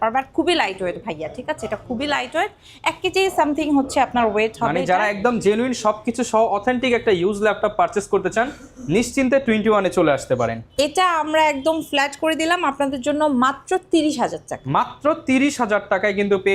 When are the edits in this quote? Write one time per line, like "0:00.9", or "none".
none